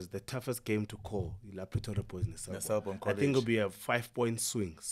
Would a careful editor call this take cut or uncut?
uncut